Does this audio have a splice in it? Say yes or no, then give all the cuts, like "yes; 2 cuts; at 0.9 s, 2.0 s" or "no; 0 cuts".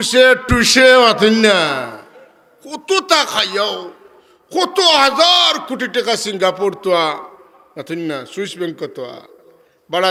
no; 0 cuts